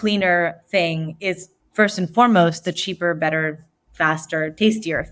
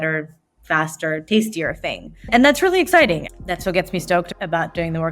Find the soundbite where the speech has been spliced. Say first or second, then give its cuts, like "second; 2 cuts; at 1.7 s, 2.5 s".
second; 2 cuts; at 3.2 s, 4.3 s